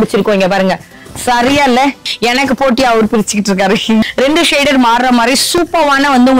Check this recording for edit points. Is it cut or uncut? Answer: cut